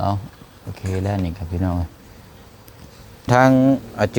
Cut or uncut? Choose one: cut